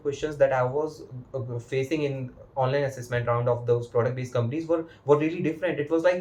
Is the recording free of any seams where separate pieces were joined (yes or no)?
yes